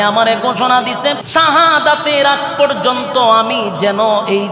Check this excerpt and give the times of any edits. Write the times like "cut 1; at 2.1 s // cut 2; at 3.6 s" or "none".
cut 1; at 1.2 s